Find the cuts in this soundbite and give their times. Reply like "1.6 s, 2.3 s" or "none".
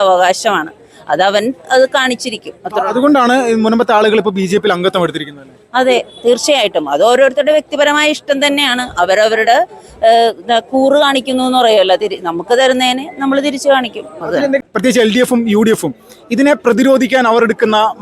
14.6 s